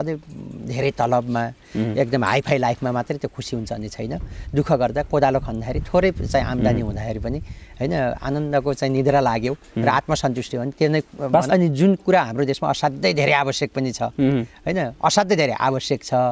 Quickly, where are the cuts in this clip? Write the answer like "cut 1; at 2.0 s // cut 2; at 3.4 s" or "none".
cut 1; at 11.5 s